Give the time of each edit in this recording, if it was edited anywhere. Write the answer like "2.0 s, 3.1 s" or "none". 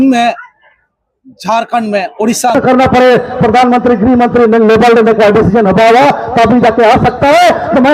2.6 s